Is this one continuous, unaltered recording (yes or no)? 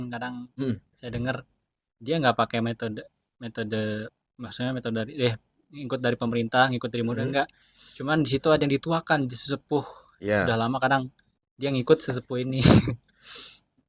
yes